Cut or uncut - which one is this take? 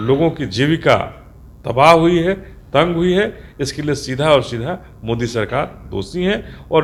uncut